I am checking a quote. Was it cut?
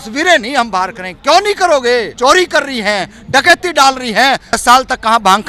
yes; 2 cuts; at 2.1 s, 4.6 s

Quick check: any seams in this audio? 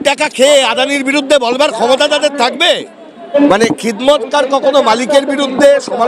yes; 1 cut; at 3.3 s

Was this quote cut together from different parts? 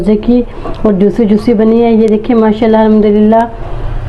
no; 0 cuts

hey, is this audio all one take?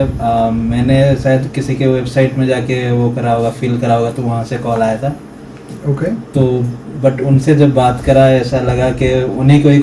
yes; 0 cuts

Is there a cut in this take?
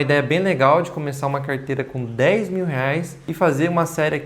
yes; 1 cut; at 3.2 s

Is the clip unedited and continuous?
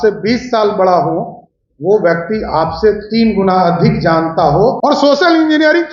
no; 1 cut; at 4.8 s

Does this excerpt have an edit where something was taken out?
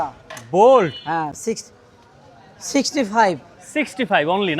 no; 0 cuts

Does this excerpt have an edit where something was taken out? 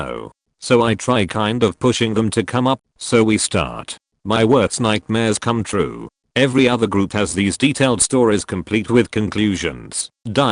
yes; 1 cut; at 2.8 s

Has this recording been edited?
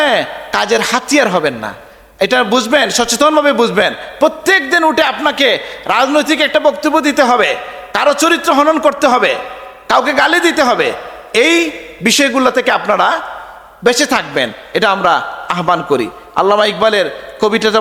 no; 0 cuts

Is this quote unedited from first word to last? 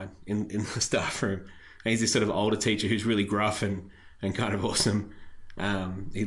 yes; 0 cuts

